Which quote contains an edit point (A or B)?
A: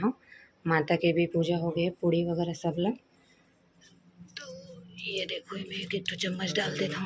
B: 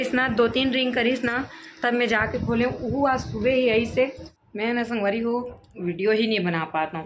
B